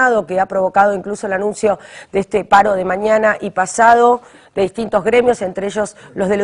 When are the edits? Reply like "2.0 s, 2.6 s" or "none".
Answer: none